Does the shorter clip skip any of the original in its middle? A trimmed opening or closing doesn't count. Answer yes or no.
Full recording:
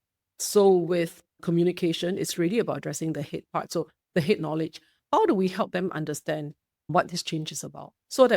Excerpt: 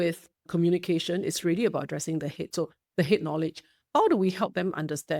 yes